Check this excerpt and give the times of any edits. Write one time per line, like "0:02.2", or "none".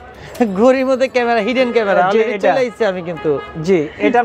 none